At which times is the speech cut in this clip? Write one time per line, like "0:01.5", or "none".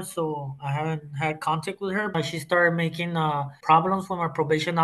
0:02.1
0:03.5